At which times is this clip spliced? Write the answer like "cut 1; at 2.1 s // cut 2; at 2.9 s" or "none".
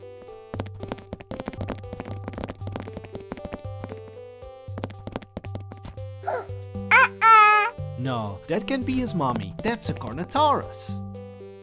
cut 1; at 9.5 s // cut 2; at 10.9 s